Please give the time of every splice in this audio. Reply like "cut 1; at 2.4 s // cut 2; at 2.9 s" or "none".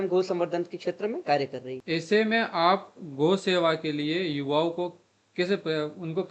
cut 1; at 1.7 s